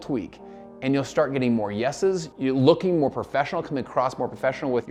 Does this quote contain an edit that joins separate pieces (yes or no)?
no